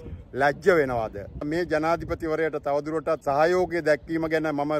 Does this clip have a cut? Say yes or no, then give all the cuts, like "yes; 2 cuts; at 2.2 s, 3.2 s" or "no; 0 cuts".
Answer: yes; 2 cuts; at 1.4 s, 3.2 s